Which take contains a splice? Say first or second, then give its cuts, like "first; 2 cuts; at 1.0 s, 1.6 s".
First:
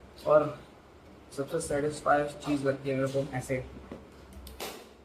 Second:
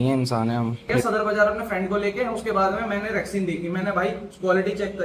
second; 1 cut; at 0.9 s